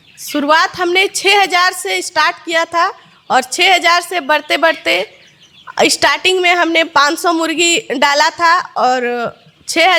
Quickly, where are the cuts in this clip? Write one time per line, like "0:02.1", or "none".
none